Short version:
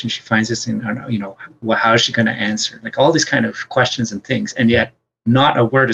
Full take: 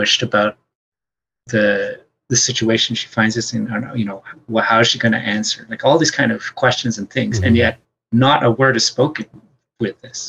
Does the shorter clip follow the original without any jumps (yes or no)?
yes